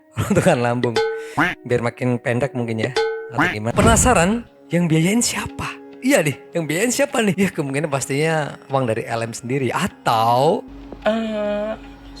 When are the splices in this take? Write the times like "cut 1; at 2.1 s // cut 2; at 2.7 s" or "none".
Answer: cut 1; at 3.7 s // cut 2; at 10.6 s